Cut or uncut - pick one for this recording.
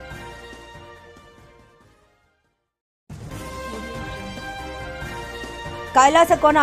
cut